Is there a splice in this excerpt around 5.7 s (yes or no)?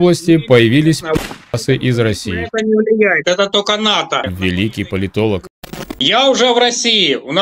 yes